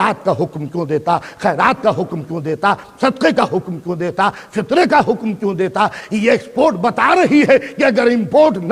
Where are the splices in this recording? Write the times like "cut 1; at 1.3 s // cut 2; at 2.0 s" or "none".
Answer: none